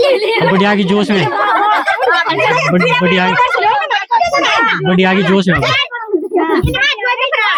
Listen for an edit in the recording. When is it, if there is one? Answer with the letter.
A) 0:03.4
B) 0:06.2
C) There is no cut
C